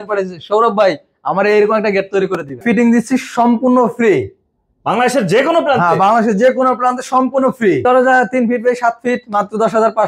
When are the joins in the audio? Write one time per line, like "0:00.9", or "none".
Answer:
0:02.6
0:07.8